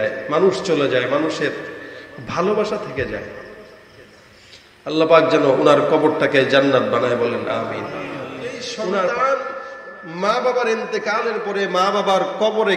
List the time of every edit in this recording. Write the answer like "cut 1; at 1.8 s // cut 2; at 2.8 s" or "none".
cut 1; at 9.0 s